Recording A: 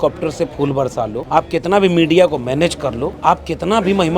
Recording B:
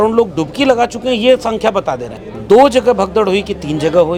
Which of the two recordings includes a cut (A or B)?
A